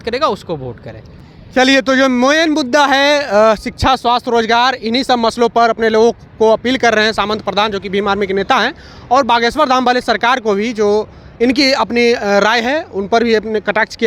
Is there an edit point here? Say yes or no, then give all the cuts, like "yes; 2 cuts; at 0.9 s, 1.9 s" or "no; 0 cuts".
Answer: no; 0 cuts